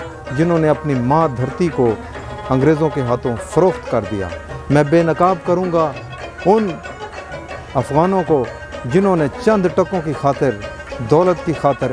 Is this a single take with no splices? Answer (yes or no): yes